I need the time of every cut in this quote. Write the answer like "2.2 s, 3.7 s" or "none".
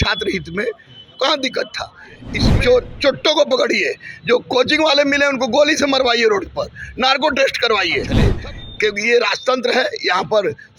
2.5 s, 8.2 s